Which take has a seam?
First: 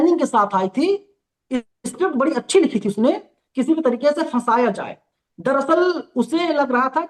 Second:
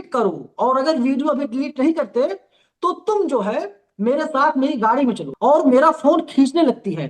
second; 1 cut; at 5.3 s

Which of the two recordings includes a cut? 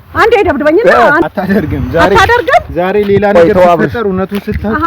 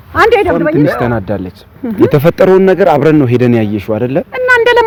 first; 1 cut; at 1.2 s

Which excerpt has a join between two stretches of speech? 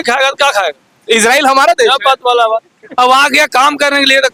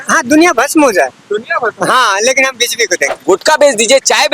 second; 1 cut; at 3.2 s

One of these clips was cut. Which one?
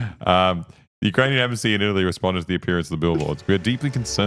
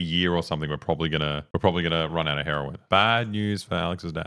second; 2 cuts; at 1.4 s, 2.8 s

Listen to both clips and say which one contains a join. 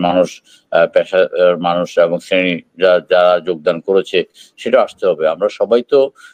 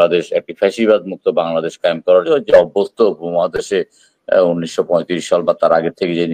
second; 1 cut; at 2.2 s

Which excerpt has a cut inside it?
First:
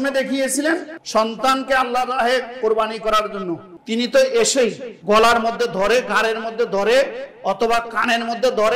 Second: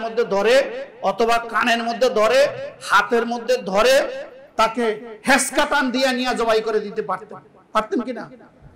first; 3 cuts; at 1.0 s, 3.7 s, 4.9 s

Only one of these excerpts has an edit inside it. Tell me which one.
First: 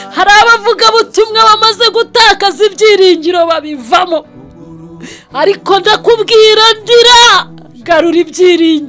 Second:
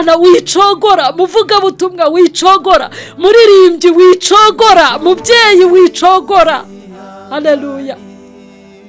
second; 1 cut; at 8.0 s

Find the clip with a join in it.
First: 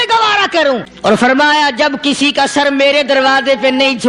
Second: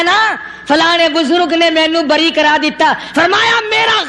first; 1 cut; at 0.9 s

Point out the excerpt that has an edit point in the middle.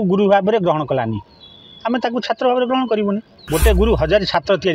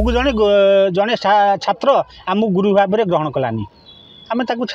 first; 1 cut; at 3.3 s

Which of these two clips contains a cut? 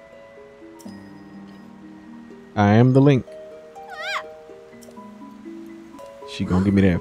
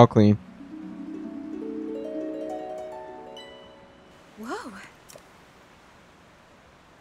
first; 1 cut; at 6.0 s

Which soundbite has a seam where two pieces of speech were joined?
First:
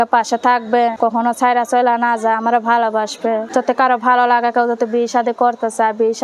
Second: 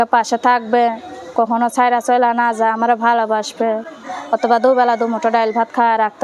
first; 2 cuts; at 0.9 s, 3.4 s

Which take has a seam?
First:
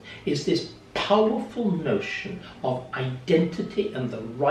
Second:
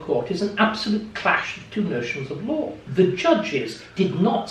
second; 1 cut; at 2.8 s

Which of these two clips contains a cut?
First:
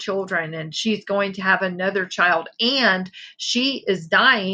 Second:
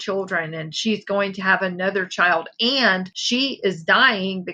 second; 1 cut; at 3.1 s

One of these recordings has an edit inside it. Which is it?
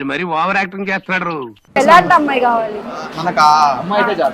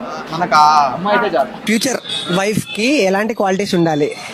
first; 1 cut; at 1.8 s

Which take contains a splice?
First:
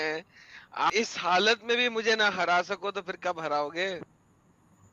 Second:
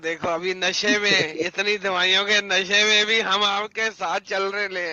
first; 1 cut; at 0.9 s

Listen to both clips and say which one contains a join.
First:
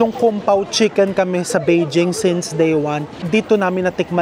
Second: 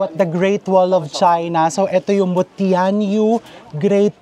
first; 1 cut; at 3.1 s

